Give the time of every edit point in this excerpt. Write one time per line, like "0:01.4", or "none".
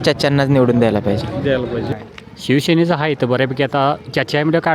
0:01.9